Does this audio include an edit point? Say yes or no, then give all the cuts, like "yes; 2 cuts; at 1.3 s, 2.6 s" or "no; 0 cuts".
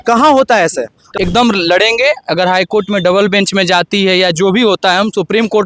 yes; 1 cut; at 1.0 s